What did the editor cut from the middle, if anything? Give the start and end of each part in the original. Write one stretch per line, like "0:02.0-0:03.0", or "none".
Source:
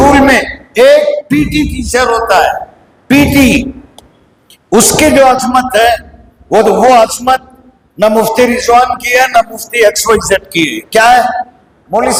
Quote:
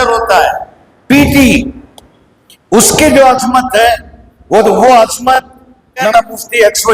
0:08.0-0:09.2

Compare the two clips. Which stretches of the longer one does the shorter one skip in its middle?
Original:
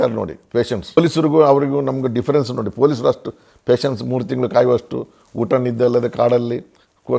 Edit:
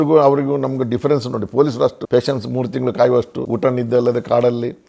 0:03.2-0:03.6
0:05.0-0:05.3

